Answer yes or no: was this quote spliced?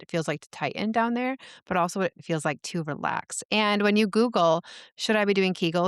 yes